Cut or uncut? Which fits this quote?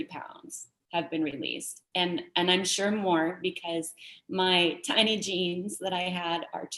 uncut